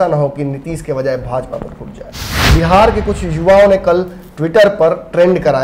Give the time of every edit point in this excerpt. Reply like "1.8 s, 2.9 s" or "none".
2.3 s